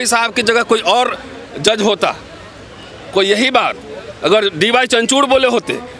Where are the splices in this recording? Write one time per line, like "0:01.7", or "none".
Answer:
none